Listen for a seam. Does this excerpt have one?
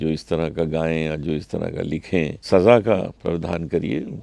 yes; 1 cut; at 2.4 s

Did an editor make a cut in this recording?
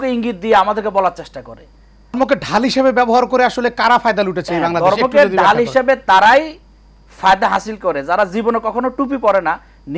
yes; 1 cut; at 2.2 s

